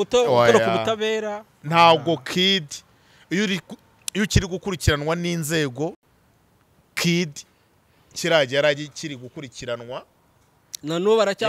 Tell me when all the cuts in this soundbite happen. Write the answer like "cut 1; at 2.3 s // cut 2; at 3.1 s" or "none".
none